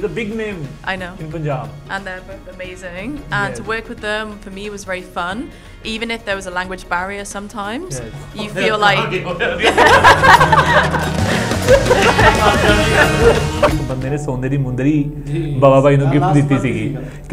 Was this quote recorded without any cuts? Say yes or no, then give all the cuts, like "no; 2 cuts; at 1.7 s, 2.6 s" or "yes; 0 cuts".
no; 1 cut; at 13.8 s